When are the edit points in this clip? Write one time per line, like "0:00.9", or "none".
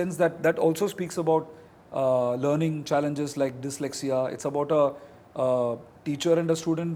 none